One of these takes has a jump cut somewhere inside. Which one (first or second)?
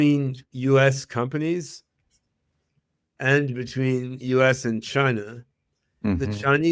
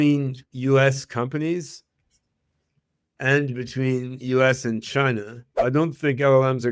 second